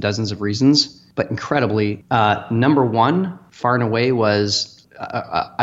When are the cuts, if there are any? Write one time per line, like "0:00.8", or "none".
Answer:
0:01.0
0:02.0
0:03.4
0:04.7